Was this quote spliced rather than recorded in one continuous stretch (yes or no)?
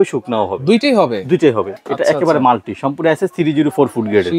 yes